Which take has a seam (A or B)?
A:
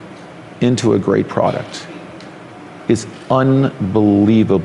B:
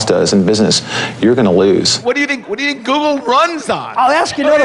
B